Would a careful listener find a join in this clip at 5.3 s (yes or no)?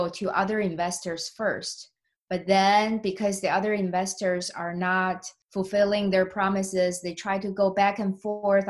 yes